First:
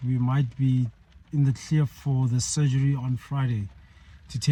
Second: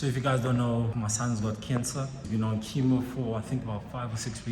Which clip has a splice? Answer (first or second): second